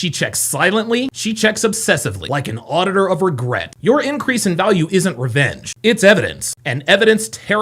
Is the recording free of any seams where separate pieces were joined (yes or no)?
yes